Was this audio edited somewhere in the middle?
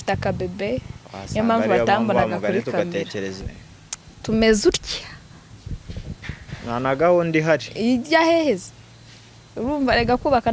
yes; 1 cut; at 3.4 s

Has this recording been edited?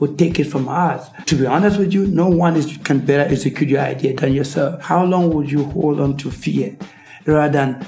yes; 1 cut; at 1.1 s

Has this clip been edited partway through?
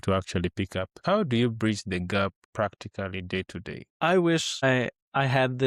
yes; 4 cuts; at 0.9 s, 2.4 s, 3.8 s, 4.9 s

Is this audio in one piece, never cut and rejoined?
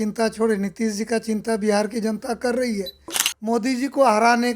no; 1 cut; at 3.2 s

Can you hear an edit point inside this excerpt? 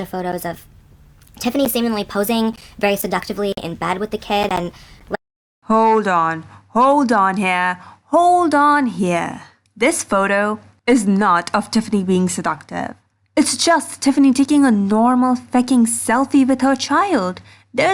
no; 0 cuts

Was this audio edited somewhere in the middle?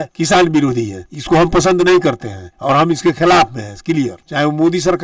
no; 0 cuts

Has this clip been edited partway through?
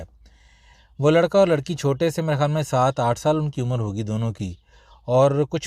no; 0 cuts

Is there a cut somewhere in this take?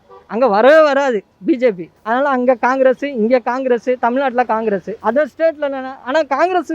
yes; 2 cuts; at 1.9 s, 4.9 s

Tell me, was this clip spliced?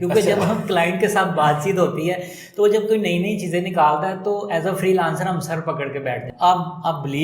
yes; 1 cut; at 6.3 s

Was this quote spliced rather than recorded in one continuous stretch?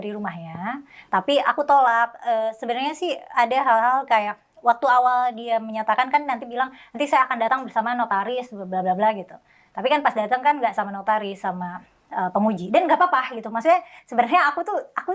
no; 0 cuts

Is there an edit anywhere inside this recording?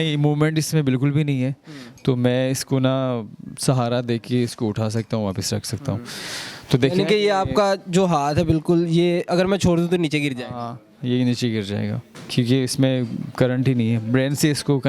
no; 0 cuts

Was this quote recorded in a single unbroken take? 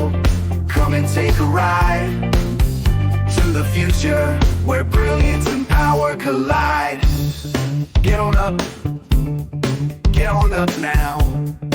yes; 0 cuts

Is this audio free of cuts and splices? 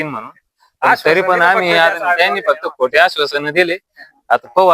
yes; 0 cuts

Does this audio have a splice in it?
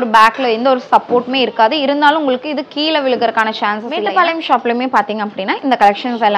yes; 1 cut; at 3.9 s

